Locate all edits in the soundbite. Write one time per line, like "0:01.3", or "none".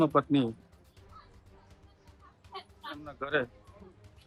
none